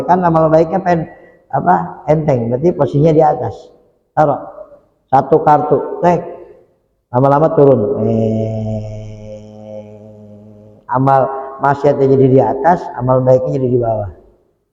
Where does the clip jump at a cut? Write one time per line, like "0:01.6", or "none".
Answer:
none